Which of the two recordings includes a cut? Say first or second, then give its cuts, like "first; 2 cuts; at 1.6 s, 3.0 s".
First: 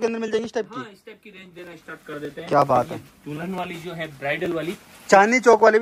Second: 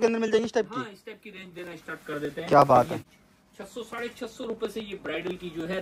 second; 1 cut; at 3.1 s